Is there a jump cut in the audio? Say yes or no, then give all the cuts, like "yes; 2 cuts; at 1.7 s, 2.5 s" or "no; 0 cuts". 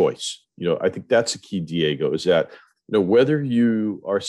no; 0 cuts